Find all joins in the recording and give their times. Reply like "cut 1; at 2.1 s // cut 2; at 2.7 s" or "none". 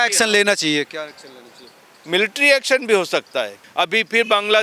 cut 1; at 3.5 s